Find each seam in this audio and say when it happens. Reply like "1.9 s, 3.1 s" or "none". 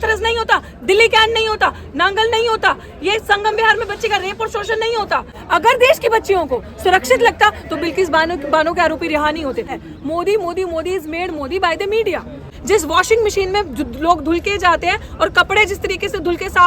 5.3 s, 9.8 s, 12.5 s